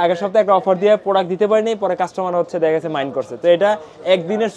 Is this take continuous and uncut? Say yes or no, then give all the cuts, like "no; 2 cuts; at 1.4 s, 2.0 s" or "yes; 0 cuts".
yes; 0 cuts